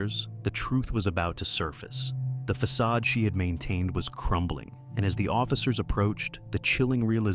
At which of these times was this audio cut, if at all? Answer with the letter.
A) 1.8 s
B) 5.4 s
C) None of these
C